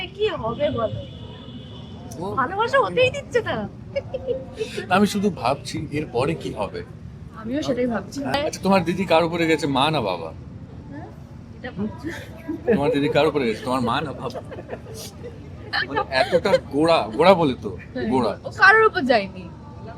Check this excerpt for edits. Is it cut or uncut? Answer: cut